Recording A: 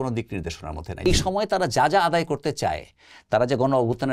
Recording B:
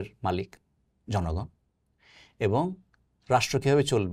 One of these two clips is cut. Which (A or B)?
A